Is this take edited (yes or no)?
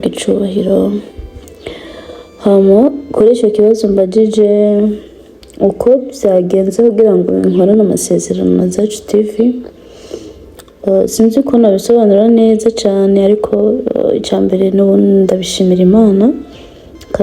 no